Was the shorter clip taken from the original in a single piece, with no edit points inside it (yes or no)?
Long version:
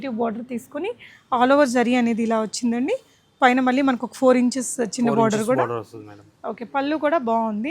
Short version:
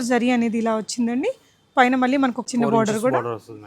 no